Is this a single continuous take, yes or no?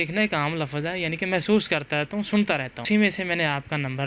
no